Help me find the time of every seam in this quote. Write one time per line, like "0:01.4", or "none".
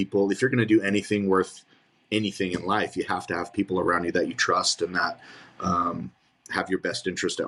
none